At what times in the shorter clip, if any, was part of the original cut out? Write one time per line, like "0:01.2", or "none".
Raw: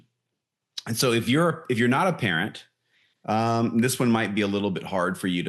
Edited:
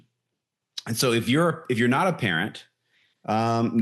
none